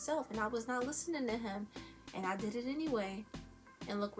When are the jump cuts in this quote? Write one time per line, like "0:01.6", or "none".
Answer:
none